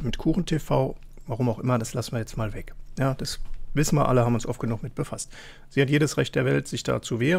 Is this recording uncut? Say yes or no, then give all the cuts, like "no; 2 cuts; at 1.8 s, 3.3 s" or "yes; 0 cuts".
yes; 0 cuts